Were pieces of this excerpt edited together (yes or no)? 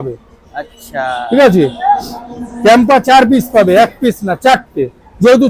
no